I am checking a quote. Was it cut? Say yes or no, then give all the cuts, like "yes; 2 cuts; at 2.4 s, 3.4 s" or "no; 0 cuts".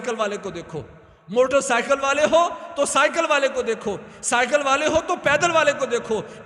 no; 0 cuts